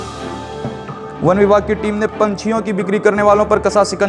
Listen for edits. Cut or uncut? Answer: uncut